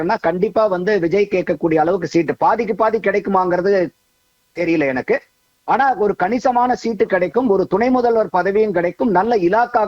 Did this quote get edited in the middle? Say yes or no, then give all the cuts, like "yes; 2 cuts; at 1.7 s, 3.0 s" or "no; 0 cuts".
no; 0 cuts